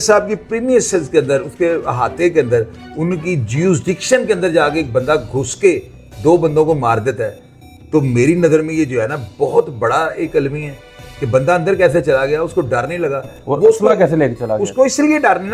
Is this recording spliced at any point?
no; 0 cuts

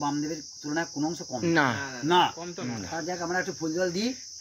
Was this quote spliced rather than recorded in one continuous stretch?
yes; 1 cut; at 2.9 s

